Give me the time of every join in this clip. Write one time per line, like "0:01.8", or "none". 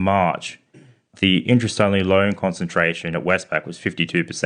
0:01.1

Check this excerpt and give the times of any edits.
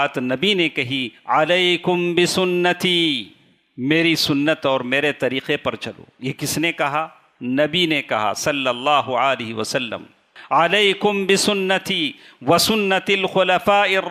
0:10.3

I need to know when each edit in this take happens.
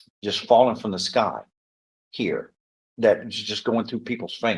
none

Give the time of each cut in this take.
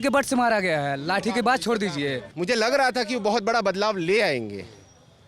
0:02.3

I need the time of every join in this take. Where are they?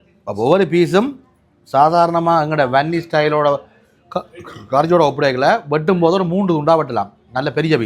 none

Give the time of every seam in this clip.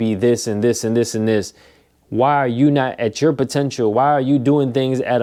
none

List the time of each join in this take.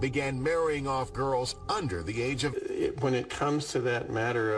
none

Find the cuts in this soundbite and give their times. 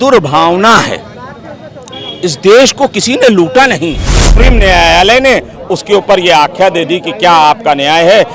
0:04.3

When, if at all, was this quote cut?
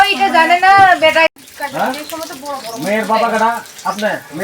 0:01.5

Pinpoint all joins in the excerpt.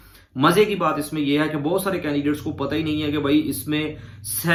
none

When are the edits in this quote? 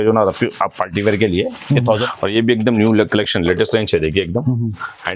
0:01.9

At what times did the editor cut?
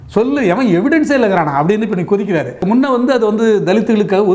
0:02.6

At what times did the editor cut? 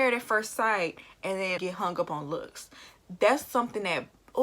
0:01.6

